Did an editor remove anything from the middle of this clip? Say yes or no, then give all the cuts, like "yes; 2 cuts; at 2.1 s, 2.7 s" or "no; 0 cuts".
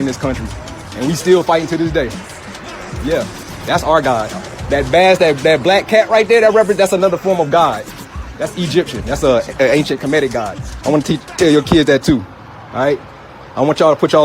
yes; 1 cut; at 6.9 s